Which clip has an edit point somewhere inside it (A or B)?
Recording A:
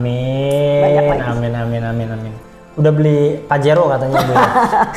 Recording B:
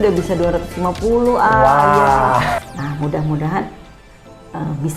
B